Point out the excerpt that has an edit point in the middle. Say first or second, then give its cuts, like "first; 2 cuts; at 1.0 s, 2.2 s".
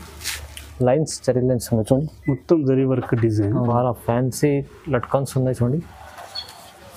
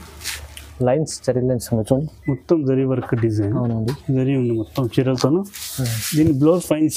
first; 1 cut; at 3.7 s